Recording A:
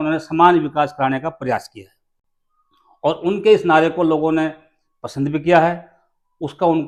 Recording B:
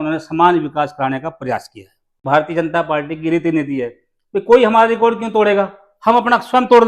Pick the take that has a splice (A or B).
B